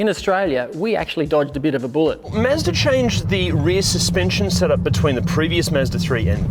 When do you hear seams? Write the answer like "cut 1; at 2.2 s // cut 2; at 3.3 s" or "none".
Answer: cut 1; at 2.3 s